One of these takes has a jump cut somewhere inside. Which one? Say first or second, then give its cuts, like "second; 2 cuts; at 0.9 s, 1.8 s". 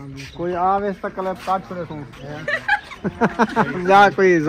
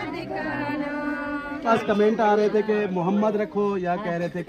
second; 1 cut; at 1.6 s